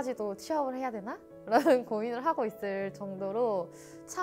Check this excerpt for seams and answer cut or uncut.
uncut